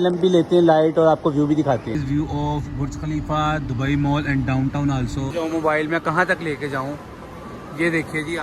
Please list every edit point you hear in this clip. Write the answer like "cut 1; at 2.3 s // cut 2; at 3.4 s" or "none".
cut 1; at 2.0 s // cut 2; at 5.3 s